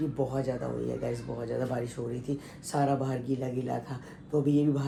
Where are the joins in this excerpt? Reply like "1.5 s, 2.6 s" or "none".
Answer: none